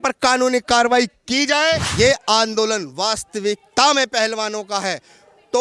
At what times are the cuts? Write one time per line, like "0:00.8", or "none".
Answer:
0:01.9